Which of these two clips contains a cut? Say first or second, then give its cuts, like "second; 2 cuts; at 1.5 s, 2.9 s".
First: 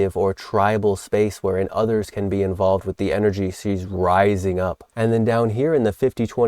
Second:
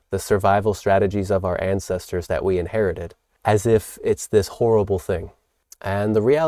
first; 1 cut; at 4.8 s